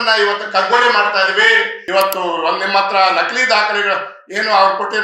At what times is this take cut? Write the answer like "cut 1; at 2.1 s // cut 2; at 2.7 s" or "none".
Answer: cut 1; at 1.8 s